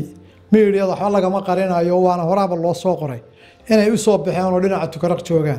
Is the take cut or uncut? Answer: uncut